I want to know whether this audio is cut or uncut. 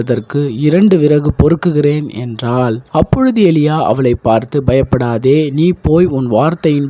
cut